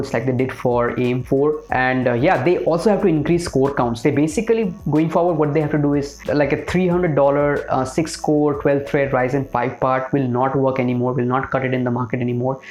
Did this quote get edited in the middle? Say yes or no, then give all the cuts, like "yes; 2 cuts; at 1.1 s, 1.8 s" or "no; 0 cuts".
no; 0 cuts